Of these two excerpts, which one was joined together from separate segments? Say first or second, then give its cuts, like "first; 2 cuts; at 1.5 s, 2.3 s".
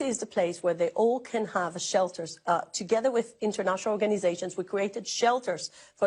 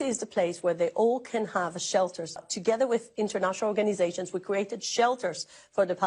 second; 1 cut; at 2.4 s